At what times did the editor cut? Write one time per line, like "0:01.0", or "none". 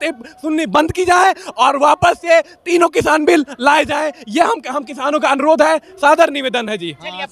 none